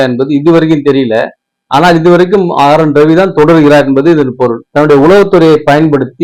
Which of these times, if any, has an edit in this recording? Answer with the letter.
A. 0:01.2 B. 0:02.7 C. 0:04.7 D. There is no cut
C